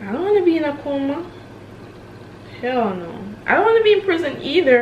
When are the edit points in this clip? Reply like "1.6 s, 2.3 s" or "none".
none